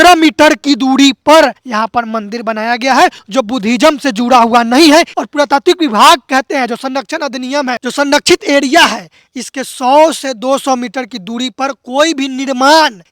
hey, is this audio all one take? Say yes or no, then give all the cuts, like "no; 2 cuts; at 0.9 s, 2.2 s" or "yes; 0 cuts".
no; 1 cut; at 7.8 s